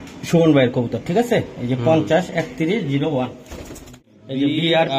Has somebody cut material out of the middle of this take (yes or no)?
yes